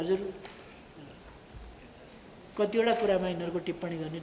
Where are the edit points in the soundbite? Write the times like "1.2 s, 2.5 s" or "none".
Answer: 2.5 s